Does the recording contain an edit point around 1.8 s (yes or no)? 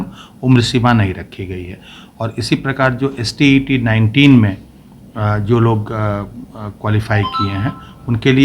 no